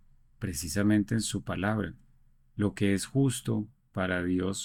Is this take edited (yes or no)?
no